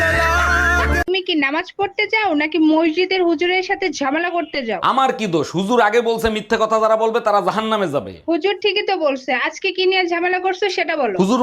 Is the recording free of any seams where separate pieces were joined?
no; 1 cut; at 1.0 s

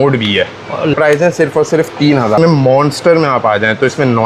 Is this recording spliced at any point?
yes; 2 cuts; at 0.9 s, 2.4 s

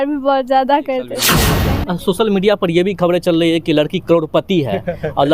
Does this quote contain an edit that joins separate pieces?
yes; 1 cut; at 1.5 s

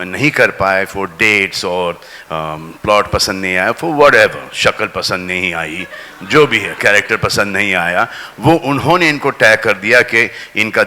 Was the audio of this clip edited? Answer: no; 0 cuts

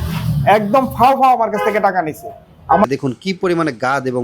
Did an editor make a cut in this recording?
yes; 1 cut; at 2.8 s

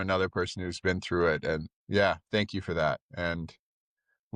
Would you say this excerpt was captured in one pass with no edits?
no; 1 cut; at 1.7 s

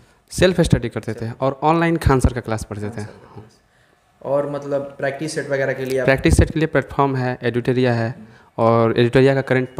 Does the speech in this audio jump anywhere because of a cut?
no; 0 cuts

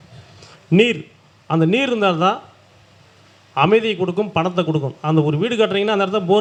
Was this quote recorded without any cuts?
yes; 0 cuts

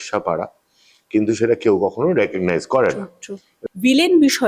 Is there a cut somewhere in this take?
yes; 1 cut; at 3.5 s

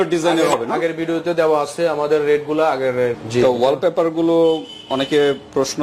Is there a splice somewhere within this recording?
yes; 1 cut; at 3.2 s

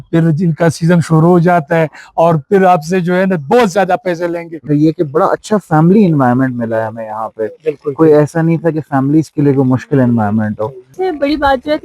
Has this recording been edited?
yes; 2 cuts; at 4.6 s, 10.8 s

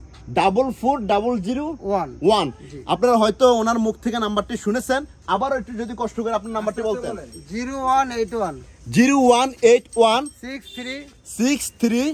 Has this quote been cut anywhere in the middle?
no; 0 cuts

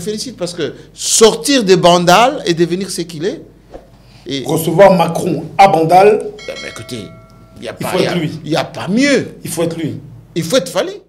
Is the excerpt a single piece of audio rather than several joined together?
yes; 0 cuts

